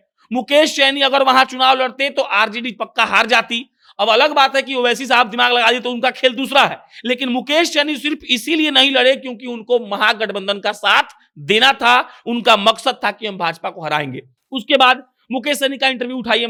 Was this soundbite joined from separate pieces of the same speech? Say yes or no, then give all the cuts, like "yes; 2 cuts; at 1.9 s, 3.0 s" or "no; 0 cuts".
no; 0 cuts